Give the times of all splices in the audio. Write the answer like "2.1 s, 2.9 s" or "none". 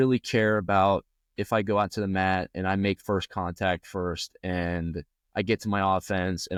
none

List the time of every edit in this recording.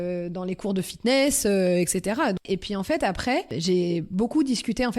2.4 s, 3.5 s

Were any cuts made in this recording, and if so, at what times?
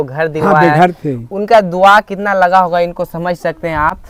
none

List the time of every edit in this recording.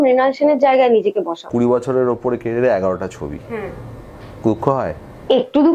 1.5 s

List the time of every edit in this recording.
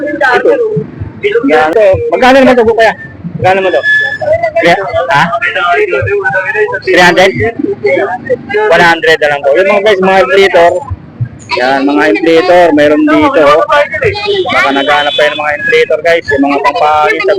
1.7 s

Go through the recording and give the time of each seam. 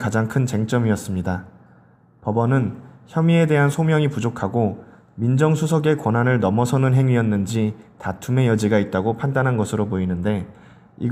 none

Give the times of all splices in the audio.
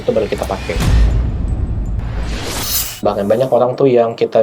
2.9 s

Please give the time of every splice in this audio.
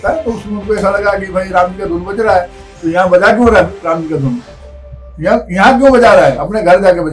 none

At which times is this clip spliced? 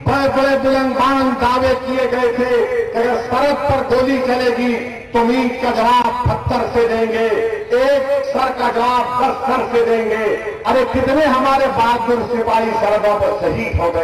6.4 s

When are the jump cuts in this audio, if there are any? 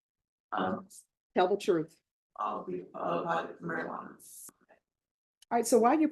4.4 s

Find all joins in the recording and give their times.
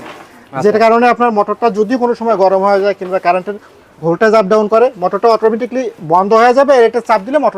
none

